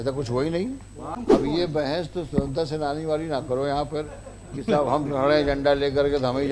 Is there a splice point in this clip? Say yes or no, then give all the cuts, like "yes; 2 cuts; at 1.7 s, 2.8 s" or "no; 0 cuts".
yes; 1 cut; at 1.1 s